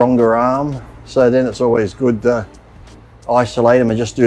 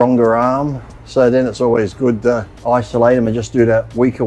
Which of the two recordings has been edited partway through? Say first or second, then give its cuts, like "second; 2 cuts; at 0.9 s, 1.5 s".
second; 1 cut; at 2.5 s